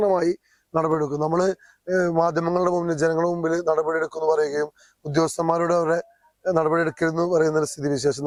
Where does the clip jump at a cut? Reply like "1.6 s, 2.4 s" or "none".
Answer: none